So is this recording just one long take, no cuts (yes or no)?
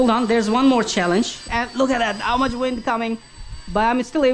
no